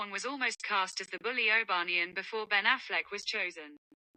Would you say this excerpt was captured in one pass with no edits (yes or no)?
yes